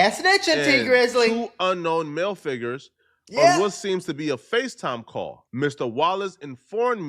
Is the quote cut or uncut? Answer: cut